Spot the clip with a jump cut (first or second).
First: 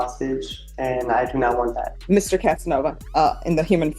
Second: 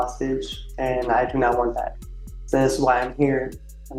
first